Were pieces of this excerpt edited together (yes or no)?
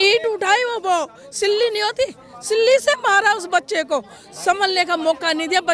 no